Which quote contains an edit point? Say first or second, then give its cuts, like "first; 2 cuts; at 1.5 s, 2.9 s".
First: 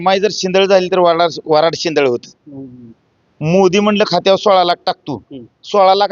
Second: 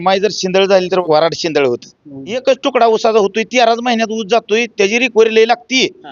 second; 2 cuts; at 1.0 s, 2.4 s